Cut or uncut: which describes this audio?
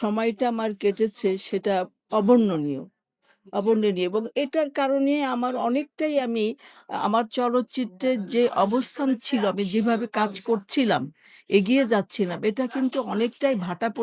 uncut